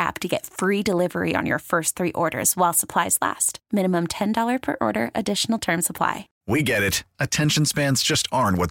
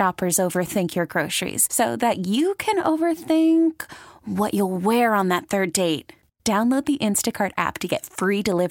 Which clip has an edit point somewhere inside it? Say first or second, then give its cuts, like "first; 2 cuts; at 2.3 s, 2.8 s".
first; 1 cut; at 6.3 s